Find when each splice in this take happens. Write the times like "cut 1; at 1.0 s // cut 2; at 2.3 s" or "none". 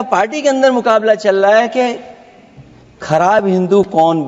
none